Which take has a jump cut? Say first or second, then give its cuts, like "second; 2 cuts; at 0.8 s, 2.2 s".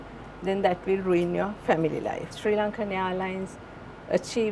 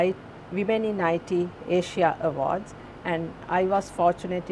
first; 1 cut; at 2.3 s